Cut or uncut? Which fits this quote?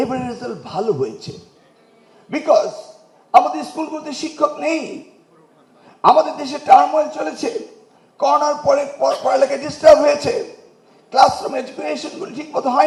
uncut